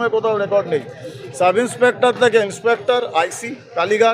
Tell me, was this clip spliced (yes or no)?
no